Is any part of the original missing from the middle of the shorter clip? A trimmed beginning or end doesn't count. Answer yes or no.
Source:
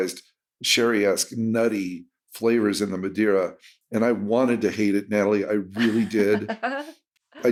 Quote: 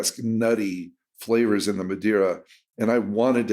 no